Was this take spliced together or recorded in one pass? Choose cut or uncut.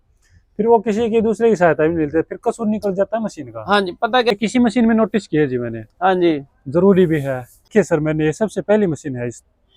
cut